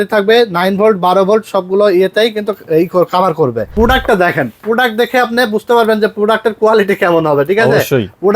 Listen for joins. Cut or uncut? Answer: cut